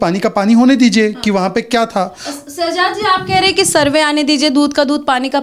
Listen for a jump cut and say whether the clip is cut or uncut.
uncut